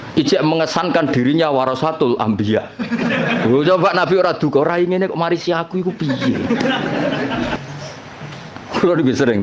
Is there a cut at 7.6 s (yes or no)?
yes